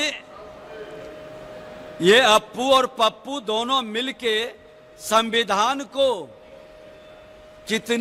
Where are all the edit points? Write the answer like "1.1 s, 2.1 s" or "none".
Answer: none